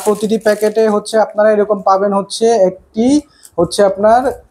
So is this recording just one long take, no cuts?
yes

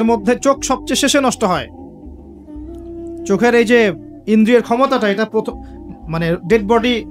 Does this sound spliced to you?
yes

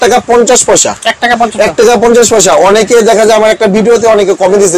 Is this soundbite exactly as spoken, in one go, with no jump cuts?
yes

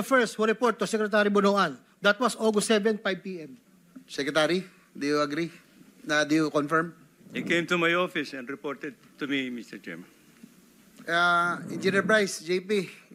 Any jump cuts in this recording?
no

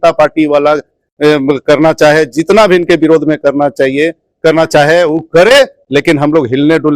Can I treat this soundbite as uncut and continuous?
yes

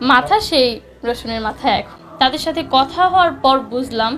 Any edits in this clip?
no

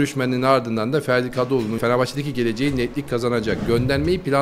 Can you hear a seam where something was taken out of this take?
yes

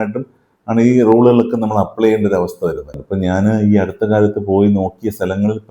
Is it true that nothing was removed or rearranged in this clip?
no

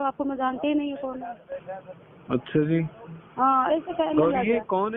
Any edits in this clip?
no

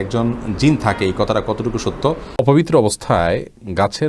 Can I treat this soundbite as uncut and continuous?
no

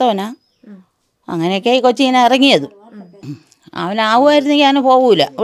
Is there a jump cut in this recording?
no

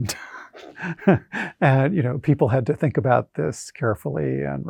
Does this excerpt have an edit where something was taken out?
no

